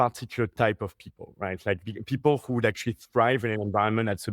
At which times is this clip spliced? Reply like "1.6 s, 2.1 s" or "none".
none